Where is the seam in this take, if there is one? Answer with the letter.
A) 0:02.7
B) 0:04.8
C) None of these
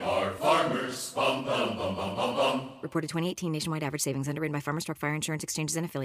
C